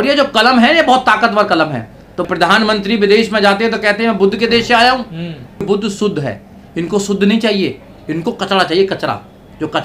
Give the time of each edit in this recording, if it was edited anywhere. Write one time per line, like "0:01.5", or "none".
0:02.2
0:05.6